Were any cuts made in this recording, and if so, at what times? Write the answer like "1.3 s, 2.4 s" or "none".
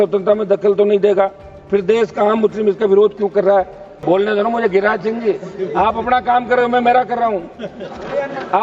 3.9 s